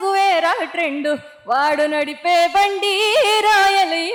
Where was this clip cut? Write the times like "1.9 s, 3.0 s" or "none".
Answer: none